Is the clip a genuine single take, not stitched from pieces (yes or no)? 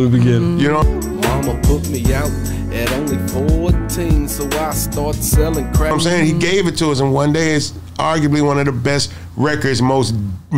no